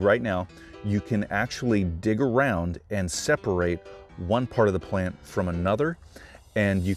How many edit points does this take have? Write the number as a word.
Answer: zero